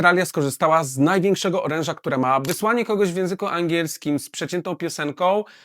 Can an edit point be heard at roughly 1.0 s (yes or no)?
no